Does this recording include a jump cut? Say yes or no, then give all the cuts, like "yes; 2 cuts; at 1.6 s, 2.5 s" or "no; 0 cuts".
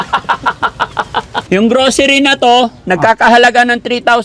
yes; 1 cut; at 1.4 s